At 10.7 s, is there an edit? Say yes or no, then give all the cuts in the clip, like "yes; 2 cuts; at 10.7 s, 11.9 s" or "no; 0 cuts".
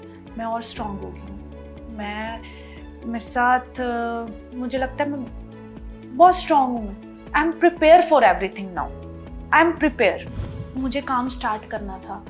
yes; 1 cut; at 10.7 s